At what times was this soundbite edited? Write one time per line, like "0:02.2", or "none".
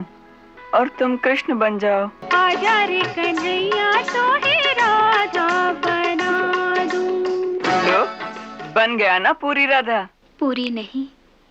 0:02.2
0:10.2